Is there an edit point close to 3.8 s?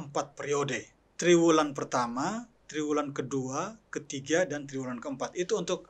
no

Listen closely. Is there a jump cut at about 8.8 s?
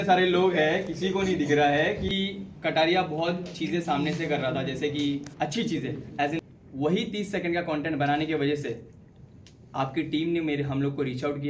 no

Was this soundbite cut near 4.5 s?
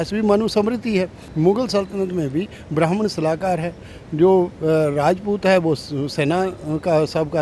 no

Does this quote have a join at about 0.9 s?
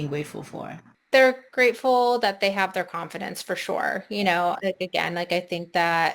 yes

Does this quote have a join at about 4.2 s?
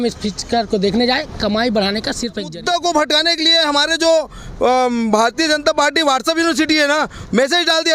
no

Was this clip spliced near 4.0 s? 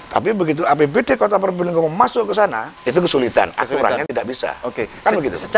no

